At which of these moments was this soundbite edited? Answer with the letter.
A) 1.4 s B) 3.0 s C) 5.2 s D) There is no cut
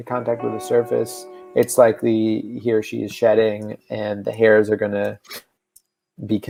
D